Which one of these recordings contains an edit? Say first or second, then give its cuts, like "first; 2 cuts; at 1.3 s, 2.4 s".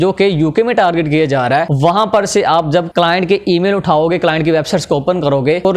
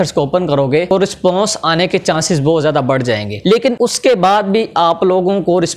first; 2 cuts; at 1.7 s, 2.9 s